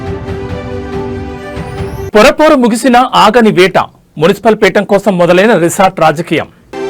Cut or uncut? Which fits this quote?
cut